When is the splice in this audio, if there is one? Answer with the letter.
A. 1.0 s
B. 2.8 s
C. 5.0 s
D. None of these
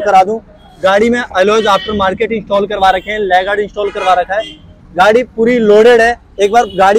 D